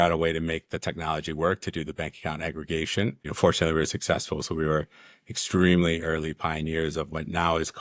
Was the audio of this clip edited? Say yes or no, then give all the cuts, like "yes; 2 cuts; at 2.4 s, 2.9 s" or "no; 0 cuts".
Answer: yes; 1 cut; at 3.3 s